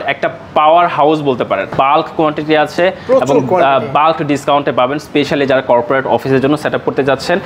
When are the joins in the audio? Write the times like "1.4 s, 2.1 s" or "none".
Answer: 1.7 s